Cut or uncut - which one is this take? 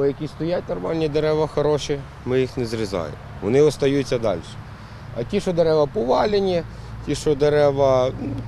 uncut